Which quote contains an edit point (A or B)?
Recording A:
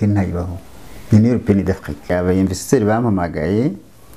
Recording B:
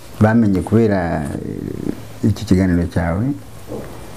A